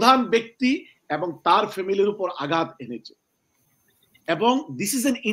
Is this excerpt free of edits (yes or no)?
yes